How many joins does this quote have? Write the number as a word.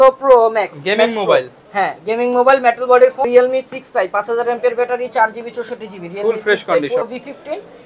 two